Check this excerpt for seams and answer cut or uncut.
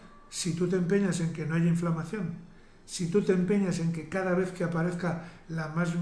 uncut